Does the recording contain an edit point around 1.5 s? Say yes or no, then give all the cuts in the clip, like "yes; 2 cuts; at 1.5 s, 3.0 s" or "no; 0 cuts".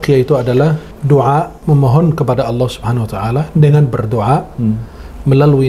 yes; 2 cuts; at 0.9 s, 1.5 s